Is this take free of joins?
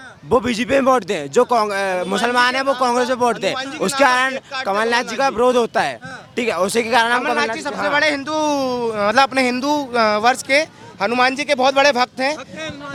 yes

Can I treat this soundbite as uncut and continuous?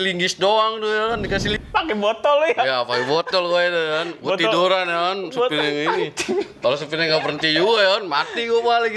no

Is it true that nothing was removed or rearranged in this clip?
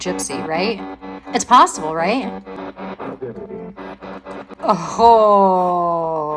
no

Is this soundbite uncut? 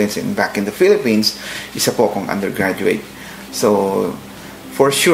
yes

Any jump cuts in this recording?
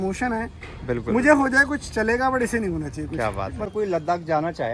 yes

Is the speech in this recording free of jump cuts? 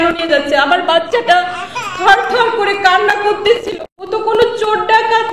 no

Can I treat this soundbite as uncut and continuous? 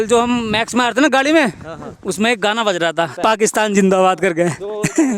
no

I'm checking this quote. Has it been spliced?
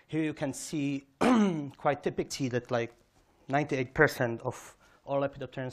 no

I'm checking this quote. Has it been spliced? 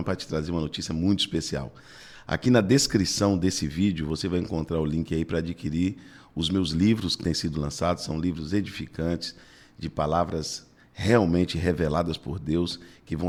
no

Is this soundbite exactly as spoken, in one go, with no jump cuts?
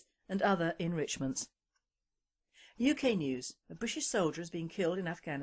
no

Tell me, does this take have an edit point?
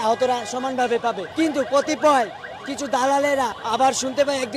no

